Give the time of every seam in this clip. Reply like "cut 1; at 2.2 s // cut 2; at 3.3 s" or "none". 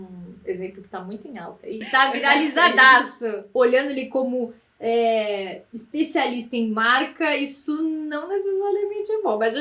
cut 1; at 1.8 s // cut 2; at 3.4 s